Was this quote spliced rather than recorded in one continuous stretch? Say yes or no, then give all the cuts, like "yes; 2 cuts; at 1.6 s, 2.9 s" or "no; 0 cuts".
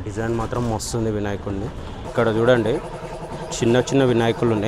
yes; 1 cut; at 1.9 s